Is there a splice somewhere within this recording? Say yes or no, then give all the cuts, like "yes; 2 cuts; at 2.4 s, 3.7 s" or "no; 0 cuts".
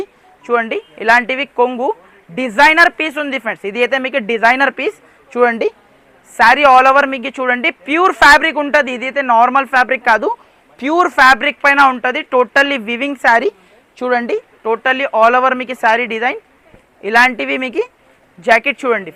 no; 0 cuts